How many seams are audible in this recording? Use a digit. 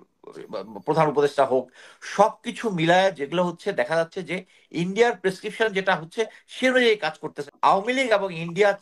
1